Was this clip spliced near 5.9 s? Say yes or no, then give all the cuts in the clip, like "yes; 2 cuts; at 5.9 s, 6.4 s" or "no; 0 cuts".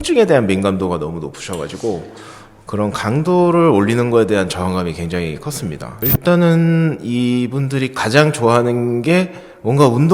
yes; 1 cut; at 5.9 s